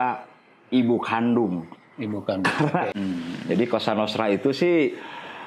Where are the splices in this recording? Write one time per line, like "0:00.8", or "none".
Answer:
0:02.9